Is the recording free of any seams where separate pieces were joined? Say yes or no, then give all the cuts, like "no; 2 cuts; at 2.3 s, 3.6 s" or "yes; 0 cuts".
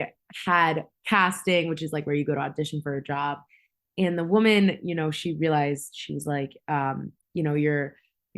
no; 1 cut; at 0.9 s